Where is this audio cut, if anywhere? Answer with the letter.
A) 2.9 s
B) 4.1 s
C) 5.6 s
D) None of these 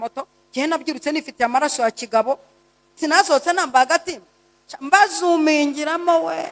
A